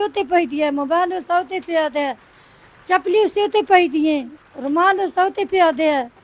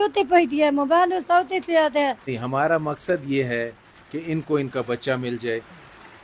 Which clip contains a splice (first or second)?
second